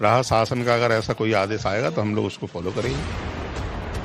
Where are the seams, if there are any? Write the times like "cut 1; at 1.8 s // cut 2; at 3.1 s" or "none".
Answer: cut 1; at 2.1 s